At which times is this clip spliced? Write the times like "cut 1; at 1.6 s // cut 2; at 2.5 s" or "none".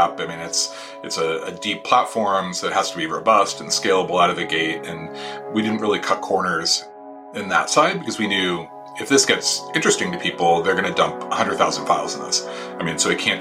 cut 1; at 7.3 s